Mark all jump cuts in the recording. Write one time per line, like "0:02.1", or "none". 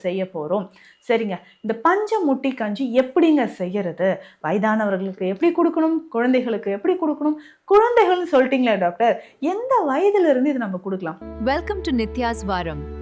0:11.2